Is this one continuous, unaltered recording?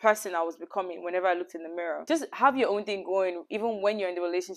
no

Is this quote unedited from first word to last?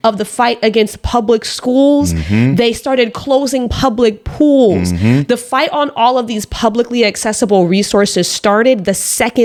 yes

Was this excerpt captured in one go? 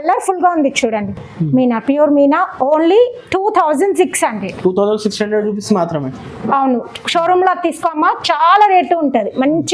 yes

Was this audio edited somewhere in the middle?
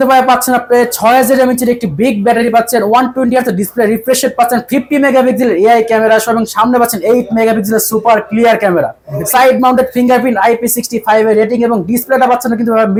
no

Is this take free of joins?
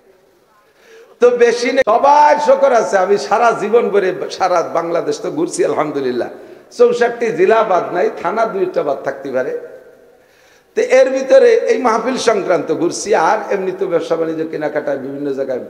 no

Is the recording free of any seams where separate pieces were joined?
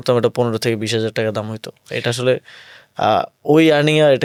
yes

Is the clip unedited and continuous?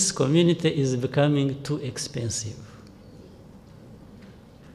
yes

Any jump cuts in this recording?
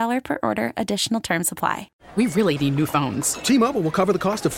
yes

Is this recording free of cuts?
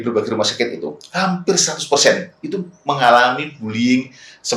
yes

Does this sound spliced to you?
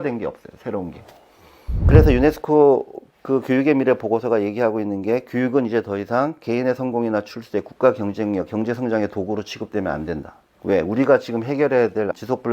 yes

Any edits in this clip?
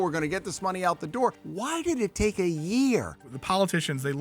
yes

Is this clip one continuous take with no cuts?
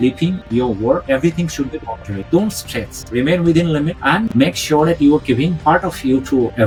yes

